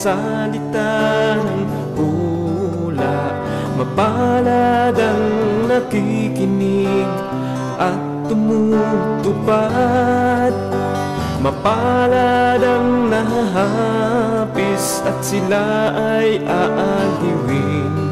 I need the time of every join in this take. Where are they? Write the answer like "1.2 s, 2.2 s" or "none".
none